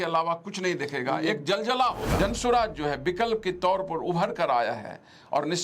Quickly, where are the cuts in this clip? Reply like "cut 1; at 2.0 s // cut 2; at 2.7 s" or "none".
cut 1; at 2.1 s